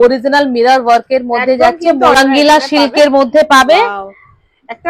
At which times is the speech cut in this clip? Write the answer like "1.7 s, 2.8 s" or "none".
2.2 s